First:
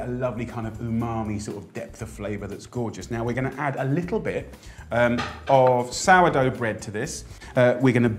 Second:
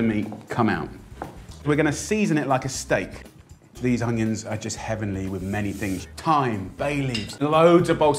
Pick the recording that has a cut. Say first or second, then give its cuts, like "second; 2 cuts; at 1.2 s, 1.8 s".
first; 1 cut; at 2.4 s